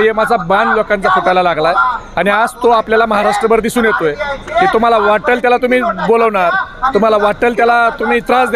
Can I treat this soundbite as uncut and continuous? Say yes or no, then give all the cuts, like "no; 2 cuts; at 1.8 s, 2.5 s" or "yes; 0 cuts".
yes; 0 cuts